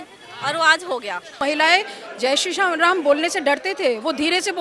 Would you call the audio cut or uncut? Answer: cut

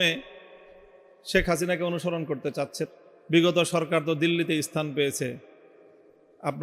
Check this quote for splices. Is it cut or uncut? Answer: cut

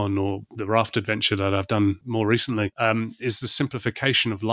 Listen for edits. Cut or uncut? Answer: cut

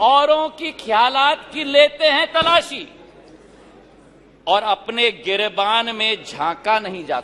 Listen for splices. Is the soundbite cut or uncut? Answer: uncut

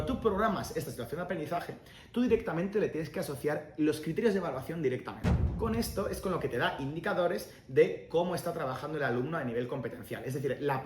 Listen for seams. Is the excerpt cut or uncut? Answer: cut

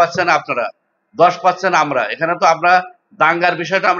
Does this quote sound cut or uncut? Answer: uncut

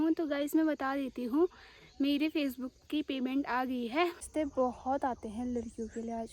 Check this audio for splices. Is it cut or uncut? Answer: cut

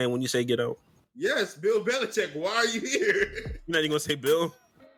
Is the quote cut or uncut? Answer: uncut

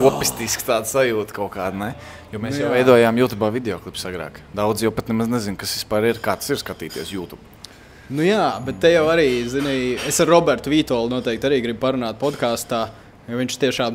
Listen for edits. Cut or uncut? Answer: uncut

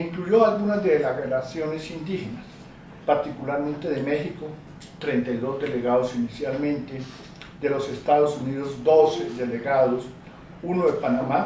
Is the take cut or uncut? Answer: cut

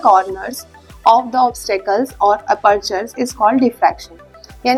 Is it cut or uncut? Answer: uncut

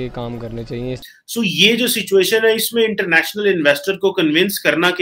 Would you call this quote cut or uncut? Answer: cut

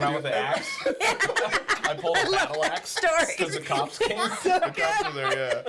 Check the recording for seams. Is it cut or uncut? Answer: uncut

